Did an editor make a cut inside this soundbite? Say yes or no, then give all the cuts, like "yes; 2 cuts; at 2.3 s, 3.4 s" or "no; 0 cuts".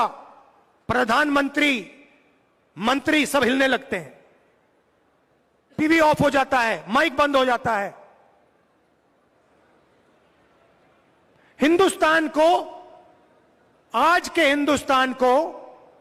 yes; 1 cut; at 9.4 s